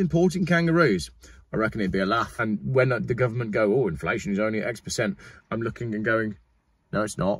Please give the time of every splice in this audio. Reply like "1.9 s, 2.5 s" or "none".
2.3 s